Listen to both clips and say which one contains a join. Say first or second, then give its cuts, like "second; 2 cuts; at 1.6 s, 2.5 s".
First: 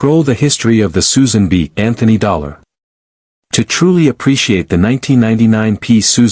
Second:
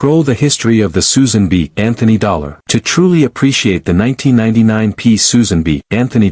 second; 1 cut; at 2.5 s